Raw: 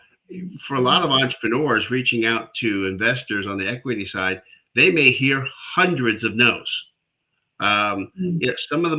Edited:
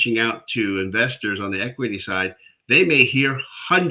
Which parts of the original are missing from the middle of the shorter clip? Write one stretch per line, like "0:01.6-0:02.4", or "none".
none